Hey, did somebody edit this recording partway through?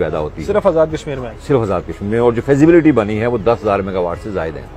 no; 0 cuts

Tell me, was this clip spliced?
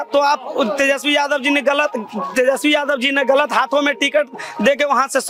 no; 0 cuts

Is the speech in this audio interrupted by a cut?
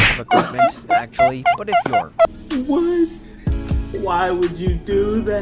yes; 1 cut; at 2.4 s

